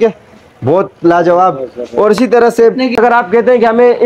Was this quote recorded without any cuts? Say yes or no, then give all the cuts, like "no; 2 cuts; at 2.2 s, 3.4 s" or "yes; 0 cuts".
no; 1 cut; at 3.0 s